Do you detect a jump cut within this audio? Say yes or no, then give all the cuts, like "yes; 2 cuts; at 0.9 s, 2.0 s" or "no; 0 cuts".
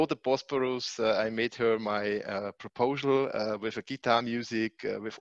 no; 0 cuts